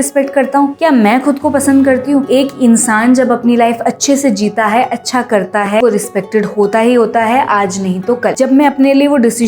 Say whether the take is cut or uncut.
cut